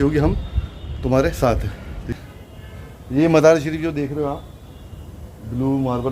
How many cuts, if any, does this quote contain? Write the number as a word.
one